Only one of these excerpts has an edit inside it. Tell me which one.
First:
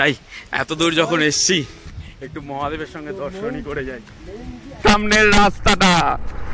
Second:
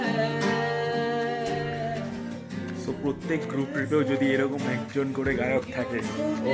first; 1 cut; at 4.6 s

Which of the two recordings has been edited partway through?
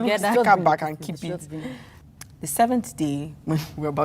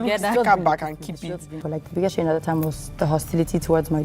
second; 1 cut; at 1.6 s

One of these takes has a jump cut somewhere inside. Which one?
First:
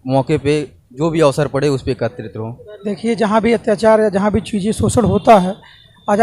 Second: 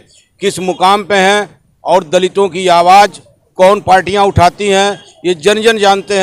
first; 1 cut; at 2.7 s

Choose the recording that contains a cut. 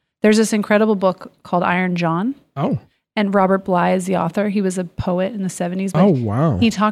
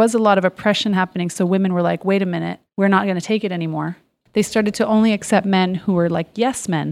second; 2 cuts; at 2.6 s, 4.2 s

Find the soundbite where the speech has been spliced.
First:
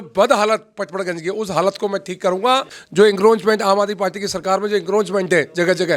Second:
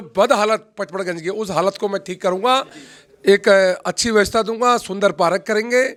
first; 1 cut; at 2.8 s

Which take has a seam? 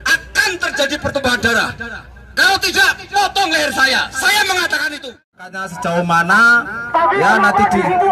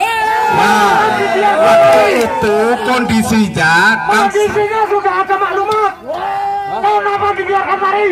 first; 1 cut; at 5.7 s

